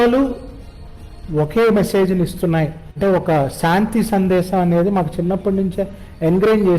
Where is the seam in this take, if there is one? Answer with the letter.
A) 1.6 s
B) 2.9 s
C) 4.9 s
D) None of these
B